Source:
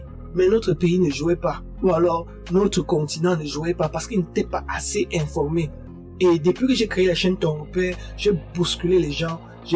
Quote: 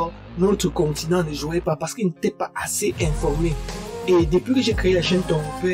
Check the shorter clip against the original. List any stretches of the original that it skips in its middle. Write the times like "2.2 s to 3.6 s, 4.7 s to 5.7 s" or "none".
none